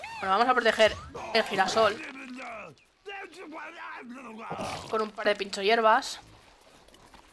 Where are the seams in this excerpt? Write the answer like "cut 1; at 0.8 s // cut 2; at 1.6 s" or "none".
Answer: none

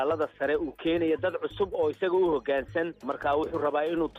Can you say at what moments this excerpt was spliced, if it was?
cut 1; at 3.1 s

